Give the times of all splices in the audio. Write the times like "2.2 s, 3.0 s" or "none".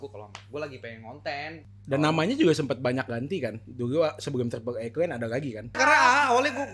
1.7 s, 5.8 s